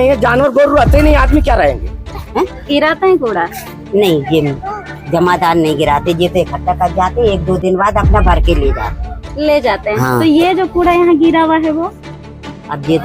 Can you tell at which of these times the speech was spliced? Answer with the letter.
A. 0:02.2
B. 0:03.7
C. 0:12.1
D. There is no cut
A